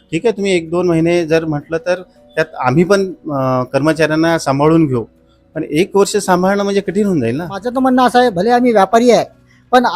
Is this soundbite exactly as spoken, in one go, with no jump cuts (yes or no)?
no